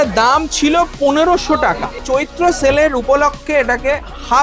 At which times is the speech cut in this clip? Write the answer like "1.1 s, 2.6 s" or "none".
2.0 s